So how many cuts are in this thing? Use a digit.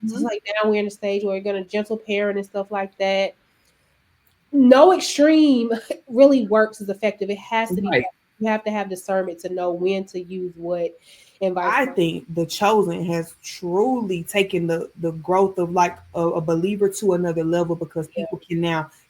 1